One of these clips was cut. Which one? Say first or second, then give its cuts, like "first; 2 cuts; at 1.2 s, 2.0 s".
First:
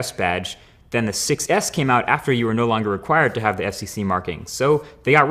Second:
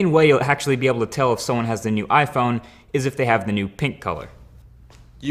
first; 1 cut; at 4.3 s